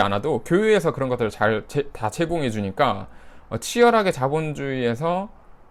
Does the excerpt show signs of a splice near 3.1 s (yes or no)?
no